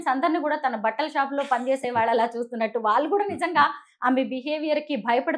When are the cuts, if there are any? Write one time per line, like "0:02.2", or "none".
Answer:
none